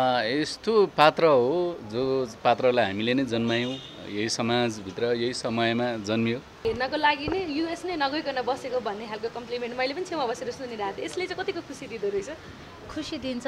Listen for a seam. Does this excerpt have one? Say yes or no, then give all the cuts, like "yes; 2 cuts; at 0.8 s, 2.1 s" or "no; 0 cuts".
yes; 1 cut; at 6.6 s